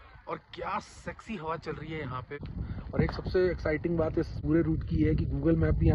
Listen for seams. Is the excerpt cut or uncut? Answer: cut